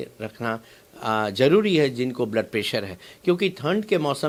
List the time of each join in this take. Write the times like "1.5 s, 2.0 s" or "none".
none